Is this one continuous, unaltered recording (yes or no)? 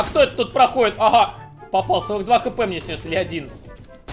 yes